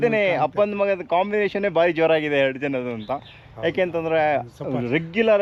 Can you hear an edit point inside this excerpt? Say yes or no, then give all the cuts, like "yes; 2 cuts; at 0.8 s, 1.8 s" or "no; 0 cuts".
no; 0 cuts